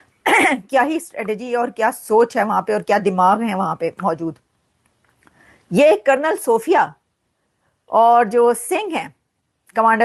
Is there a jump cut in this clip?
no; 0 cuts

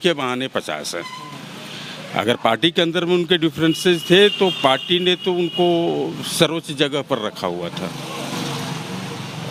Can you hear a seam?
no; 0 cuts

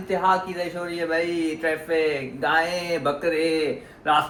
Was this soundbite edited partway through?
no; 0 cuts

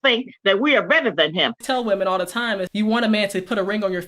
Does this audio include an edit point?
yes; 2 cuts; at 1.6 s, 2.7 s

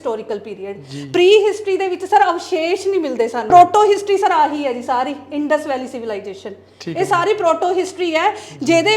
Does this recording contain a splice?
yes; 1 cut; at 3.5 s

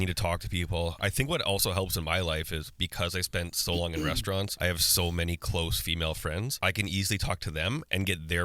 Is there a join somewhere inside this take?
yes; 2 cuts; at 4.5 s, 6.5 s

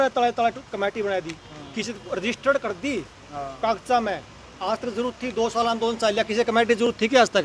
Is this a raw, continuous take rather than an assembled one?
yes; 0 cuts

